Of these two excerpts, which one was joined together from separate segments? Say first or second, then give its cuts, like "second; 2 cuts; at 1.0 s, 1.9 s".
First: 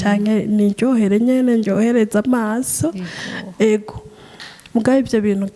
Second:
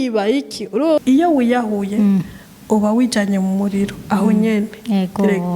second; 1 cut; at 1.0 s